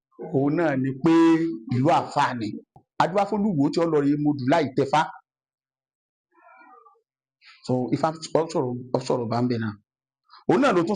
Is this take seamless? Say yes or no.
no